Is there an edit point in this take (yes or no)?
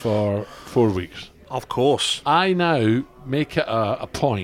no